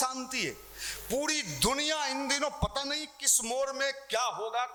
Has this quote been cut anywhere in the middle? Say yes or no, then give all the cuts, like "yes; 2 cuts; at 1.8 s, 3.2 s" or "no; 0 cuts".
no; 0 cuts